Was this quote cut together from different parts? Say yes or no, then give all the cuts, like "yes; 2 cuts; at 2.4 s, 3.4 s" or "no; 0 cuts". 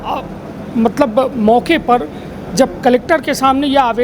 no; 0 cuts